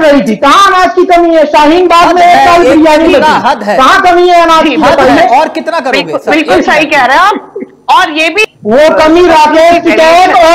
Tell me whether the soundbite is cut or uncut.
cut